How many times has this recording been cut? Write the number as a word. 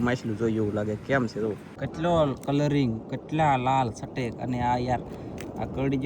one